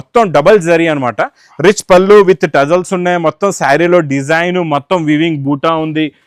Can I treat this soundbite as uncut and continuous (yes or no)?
yes